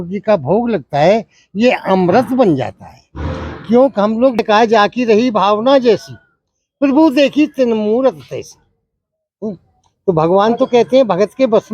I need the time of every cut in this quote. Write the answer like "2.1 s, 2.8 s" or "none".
4.4 s